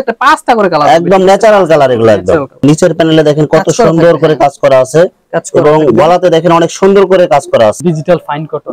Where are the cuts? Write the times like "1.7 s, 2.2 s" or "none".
2.6 s, 7.8 s